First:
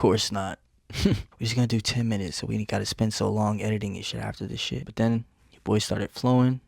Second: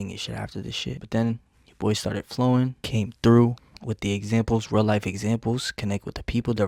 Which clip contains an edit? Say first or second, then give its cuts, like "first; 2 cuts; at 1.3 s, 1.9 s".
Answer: first; 1 cut; at 1.4 s